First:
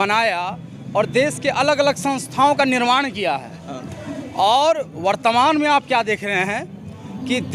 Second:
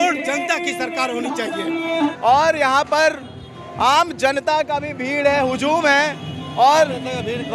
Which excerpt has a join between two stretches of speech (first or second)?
second